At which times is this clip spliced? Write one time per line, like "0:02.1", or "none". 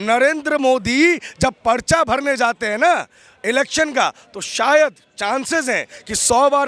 none